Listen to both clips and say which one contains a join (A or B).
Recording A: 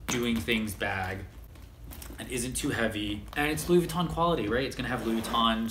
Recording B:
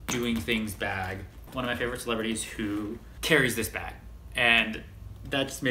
B